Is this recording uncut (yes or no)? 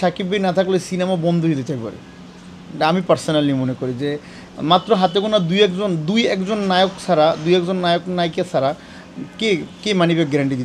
yes